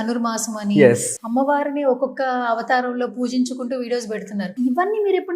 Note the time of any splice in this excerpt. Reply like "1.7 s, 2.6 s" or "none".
1.1 s, 4.5 s